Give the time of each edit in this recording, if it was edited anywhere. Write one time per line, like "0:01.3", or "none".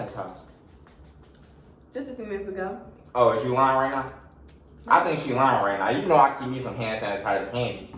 none